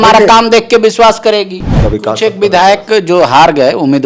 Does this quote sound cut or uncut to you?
cut